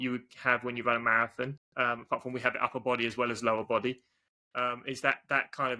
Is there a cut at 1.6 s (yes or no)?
yes